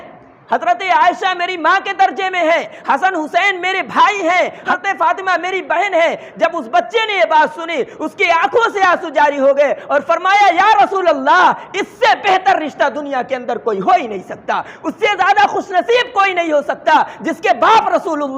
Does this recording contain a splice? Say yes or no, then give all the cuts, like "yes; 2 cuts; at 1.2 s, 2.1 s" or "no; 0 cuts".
yes; 1 cut; at 4.7 s